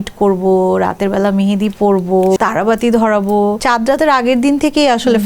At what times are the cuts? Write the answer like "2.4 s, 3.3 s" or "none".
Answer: 2.4 s, 3.6 s